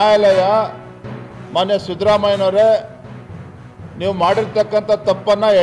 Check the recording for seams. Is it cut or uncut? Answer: uncut